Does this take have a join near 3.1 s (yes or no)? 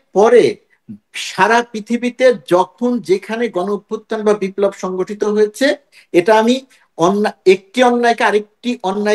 no